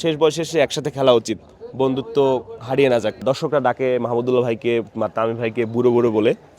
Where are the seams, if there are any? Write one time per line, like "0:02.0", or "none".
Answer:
0:03.2

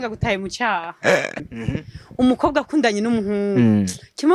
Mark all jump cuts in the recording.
0:01.4

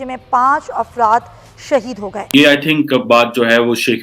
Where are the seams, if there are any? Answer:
0:02.2

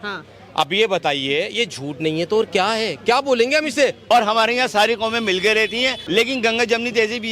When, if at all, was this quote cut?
0:04.0
0:06.0

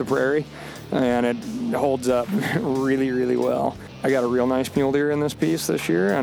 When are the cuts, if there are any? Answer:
0:03.9

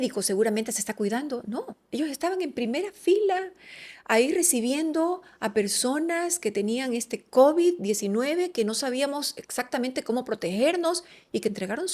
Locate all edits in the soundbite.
none

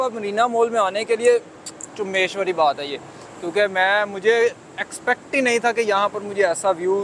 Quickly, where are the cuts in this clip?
none

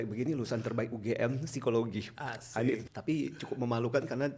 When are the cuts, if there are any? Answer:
0:02.8

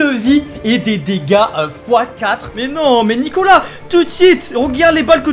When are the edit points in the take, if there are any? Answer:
0:02.6

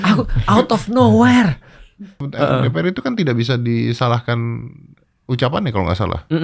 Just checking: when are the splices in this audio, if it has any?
0:02.2

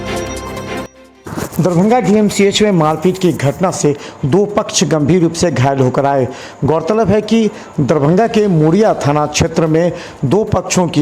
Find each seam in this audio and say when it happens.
0:00.9

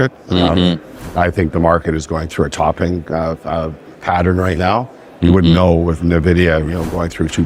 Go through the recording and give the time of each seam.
none

